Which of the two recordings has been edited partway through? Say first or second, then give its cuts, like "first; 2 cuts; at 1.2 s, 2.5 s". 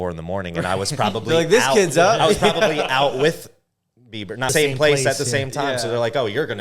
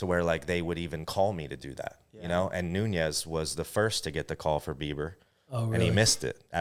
first; 1 cut; at 4.5 s